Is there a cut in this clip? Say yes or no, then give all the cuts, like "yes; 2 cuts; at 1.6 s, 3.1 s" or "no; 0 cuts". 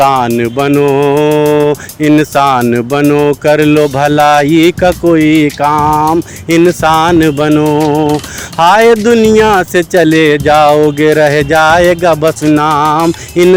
no; 0 cuts